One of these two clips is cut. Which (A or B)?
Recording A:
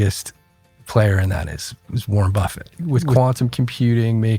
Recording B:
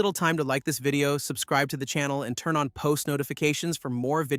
A